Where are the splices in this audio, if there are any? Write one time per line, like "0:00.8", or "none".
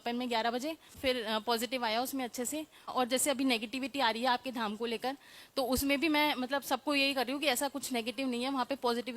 0:01.0
0:02.9